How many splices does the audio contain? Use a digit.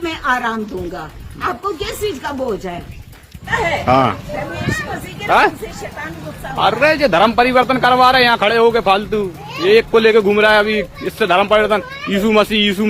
1